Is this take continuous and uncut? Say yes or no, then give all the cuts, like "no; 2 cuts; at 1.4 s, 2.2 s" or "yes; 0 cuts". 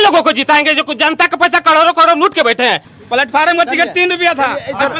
no; 1 cut; at 2.9 s